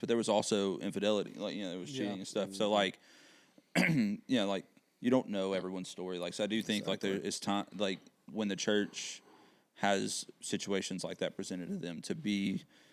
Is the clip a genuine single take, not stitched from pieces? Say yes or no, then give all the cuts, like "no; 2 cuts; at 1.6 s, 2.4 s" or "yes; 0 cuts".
yes; 0 cuts